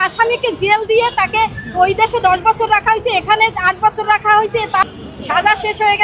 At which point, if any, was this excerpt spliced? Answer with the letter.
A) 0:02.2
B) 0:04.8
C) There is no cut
B